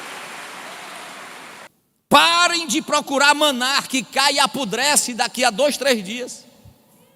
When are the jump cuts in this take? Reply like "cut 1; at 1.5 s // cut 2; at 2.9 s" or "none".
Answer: cut 1; at 1.7 s